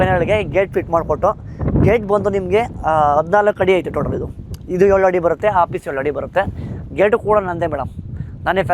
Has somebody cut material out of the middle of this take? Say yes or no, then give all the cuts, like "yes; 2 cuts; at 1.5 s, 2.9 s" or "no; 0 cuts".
no; 0 cuts